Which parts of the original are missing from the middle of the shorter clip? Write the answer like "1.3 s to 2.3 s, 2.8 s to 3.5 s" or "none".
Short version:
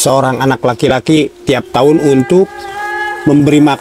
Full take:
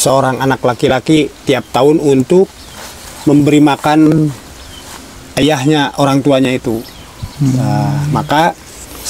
none

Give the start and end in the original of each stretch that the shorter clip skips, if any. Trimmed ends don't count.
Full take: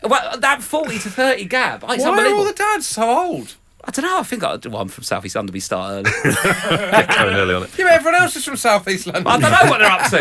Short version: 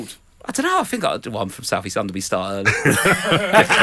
none

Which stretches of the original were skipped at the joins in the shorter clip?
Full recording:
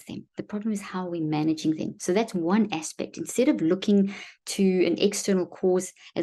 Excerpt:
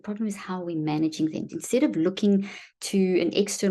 1.9 s to 3.1 s

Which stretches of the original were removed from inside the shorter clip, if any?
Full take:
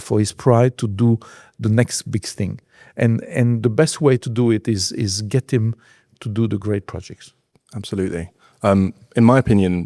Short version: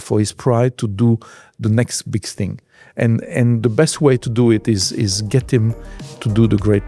none

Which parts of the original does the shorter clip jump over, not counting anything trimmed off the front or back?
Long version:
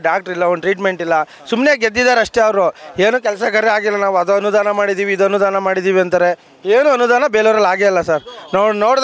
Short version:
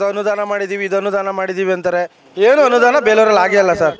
none

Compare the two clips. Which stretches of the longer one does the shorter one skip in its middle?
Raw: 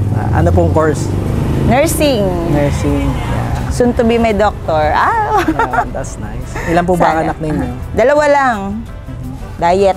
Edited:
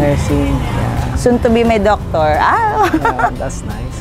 none

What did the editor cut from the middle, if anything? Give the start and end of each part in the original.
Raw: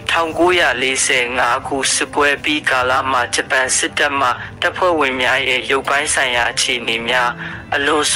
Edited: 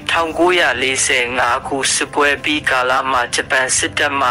none

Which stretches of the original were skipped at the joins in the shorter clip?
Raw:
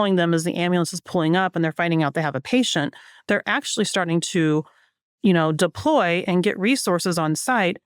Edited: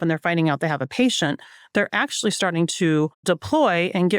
4.8 s to 5.6 s

